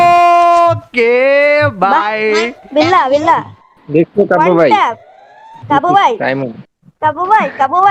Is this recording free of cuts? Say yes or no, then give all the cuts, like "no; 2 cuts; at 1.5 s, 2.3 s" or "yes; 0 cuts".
yes; 0 cuts